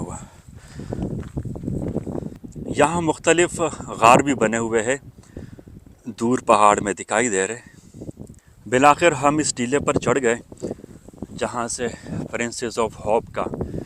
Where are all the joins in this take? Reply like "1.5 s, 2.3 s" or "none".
2.4 s, 8.5 s